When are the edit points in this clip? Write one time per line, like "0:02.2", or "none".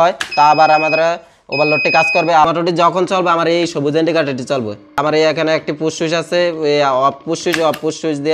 0:02.5
0:05.0